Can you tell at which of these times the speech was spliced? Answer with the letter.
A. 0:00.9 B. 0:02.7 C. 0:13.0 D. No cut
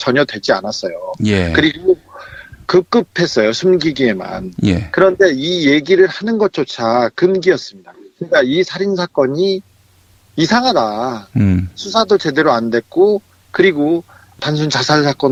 D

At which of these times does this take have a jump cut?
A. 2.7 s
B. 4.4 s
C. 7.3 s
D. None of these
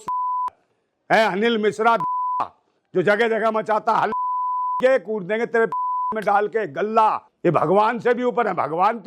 C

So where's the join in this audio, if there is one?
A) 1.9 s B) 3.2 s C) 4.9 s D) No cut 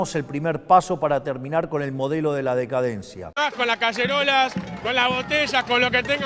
B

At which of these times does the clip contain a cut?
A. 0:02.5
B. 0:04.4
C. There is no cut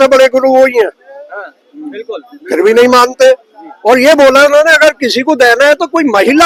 C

